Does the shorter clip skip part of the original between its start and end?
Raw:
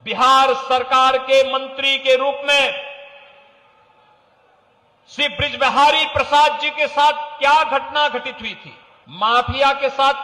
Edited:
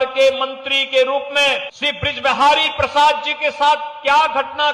yes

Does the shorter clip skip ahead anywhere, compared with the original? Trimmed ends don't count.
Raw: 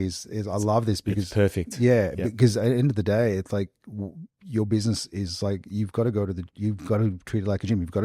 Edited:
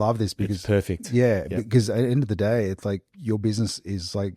yes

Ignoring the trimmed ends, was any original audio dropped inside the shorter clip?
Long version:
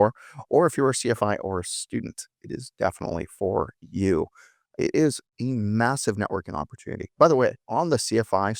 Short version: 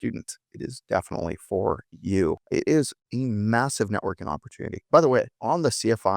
yes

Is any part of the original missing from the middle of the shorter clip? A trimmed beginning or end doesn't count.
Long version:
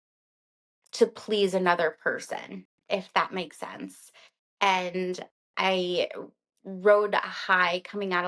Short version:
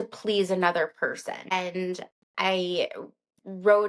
yes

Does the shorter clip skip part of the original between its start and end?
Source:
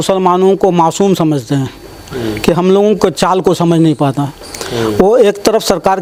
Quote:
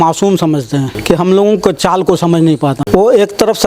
yes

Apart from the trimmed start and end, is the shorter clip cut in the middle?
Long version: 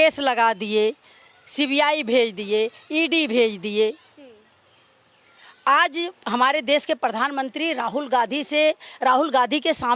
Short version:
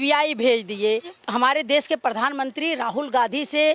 yes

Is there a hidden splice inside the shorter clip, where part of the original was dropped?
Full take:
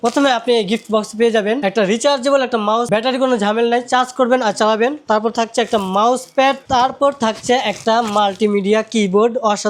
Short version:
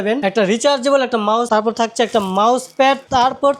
yes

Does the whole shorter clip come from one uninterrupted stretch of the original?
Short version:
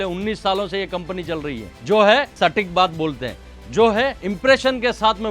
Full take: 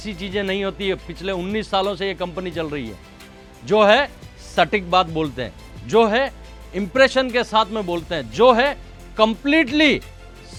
no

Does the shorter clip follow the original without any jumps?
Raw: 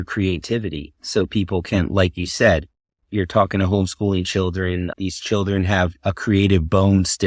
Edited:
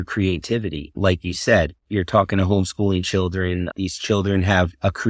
no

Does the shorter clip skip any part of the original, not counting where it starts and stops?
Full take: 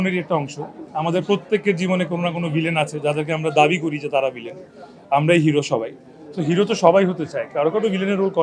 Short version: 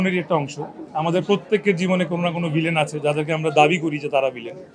no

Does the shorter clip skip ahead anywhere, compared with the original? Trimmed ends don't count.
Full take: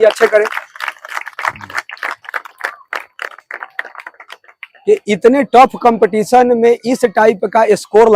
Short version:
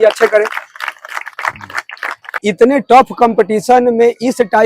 yes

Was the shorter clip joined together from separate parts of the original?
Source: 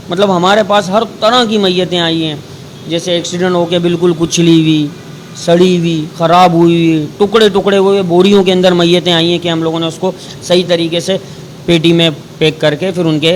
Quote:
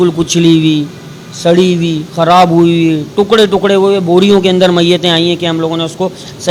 no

